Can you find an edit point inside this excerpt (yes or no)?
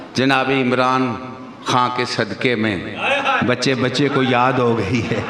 no